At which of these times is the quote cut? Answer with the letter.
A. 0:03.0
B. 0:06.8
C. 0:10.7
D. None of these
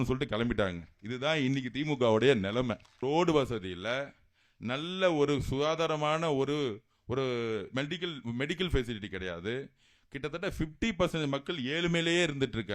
A